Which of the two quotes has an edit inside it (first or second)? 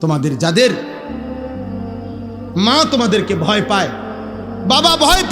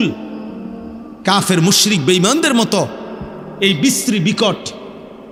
first